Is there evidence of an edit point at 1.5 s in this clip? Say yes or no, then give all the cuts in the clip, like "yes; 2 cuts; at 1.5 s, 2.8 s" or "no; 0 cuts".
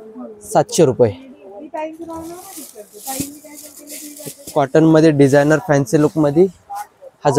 no; 0 cuts